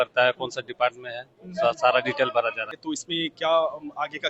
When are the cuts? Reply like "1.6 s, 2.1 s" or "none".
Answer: 2.7 s